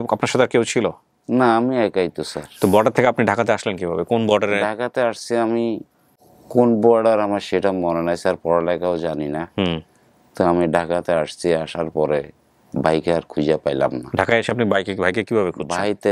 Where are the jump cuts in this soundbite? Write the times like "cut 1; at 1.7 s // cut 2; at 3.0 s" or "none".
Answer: none